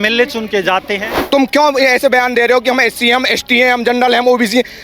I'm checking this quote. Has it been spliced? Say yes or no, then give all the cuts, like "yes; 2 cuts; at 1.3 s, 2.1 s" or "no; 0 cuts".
yes; 1 cut; at 1.1 s